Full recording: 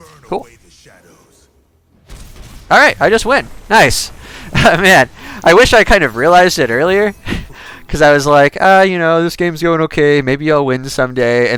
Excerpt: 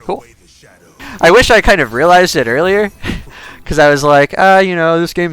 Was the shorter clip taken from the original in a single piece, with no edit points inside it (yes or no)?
no